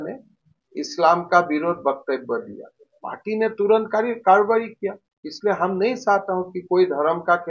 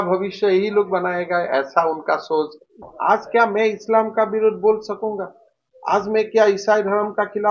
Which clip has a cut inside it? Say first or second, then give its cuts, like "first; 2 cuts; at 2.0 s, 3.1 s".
second; 1 cut; at 2.7 s